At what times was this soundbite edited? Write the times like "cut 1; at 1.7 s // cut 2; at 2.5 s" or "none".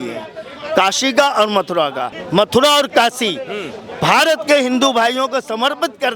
cut 1; at 2.1 s